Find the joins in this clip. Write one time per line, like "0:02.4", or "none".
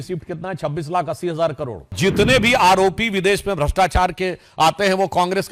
0:01.9